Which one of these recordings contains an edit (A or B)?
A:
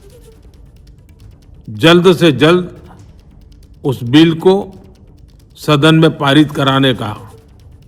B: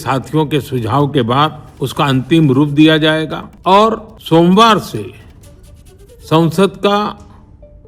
B